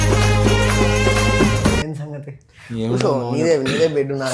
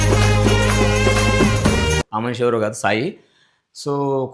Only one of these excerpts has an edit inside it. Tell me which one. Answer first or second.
first